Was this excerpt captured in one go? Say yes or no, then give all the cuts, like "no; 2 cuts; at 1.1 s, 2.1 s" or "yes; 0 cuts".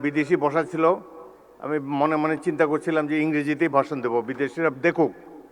yes; 0 cuts